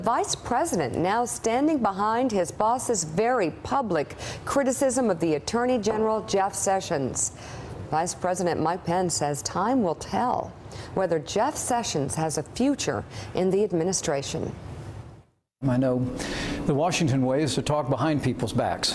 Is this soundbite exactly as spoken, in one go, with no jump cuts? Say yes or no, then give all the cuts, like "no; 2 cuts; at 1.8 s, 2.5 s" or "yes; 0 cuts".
yes; 0 cuts